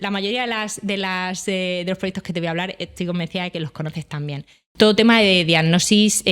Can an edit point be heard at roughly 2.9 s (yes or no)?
no